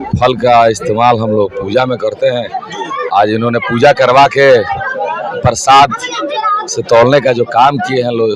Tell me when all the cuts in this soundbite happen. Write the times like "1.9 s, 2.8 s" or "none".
none